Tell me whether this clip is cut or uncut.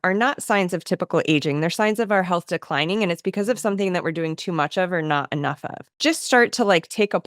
cut